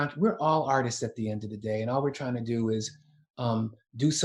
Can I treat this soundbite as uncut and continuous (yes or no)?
yes